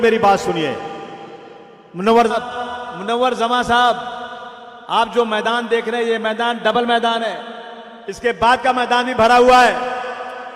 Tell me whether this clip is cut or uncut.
cut